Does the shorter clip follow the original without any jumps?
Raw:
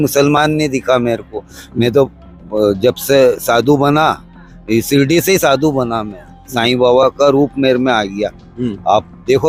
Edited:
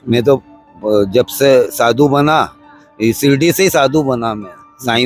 yes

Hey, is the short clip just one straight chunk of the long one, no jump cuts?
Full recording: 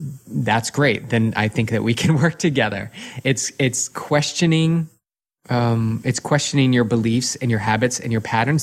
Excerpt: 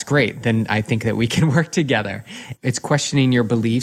no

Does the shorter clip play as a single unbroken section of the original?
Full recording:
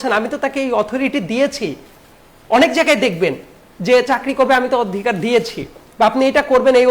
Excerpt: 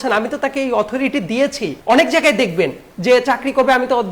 no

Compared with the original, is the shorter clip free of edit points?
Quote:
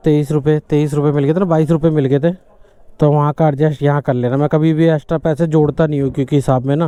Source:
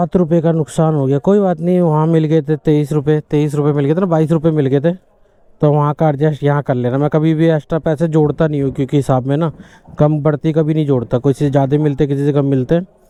yes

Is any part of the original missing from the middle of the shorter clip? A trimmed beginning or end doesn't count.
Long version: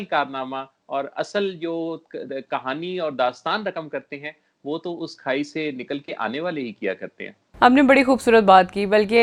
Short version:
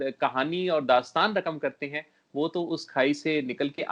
no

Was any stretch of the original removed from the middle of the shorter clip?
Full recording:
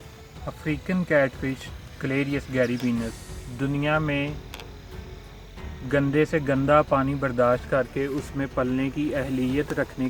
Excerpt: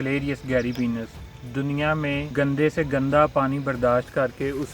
yes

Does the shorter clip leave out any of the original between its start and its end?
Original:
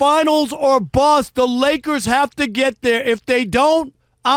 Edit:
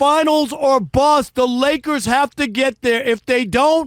no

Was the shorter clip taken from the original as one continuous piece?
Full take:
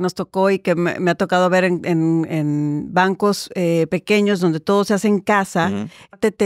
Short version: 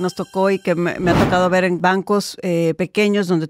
no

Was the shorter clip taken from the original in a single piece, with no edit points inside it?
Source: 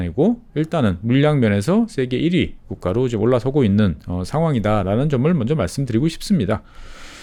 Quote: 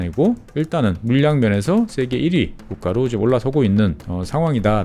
yes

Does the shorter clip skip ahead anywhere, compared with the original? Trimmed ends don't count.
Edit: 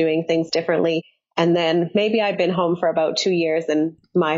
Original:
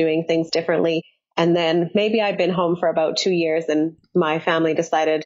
no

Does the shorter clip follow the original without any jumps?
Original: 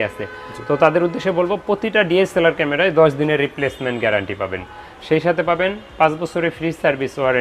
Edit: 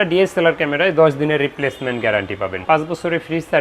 no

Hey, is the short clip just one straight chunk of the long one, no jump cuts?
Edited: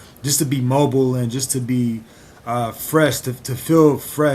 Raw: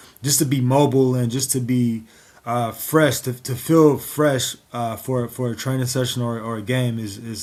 yes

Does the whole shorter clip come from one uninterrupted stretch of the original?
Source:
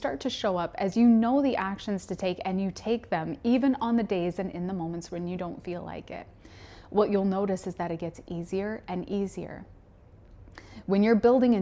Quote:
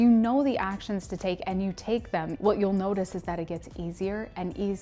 no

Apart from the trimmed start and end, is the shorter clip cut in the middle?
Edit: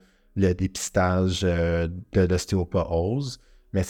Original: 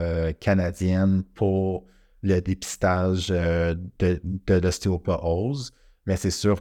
yes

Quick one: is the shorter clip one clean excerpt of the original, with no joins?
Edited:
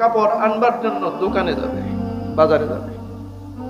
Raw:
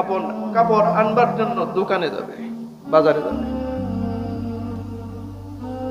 no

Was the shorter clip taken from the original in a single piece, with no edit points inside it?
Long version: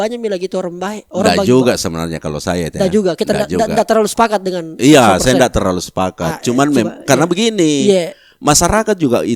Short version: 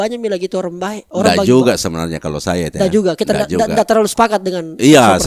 yes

